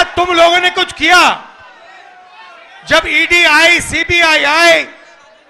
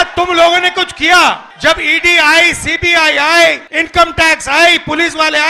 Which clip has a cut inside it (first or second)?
second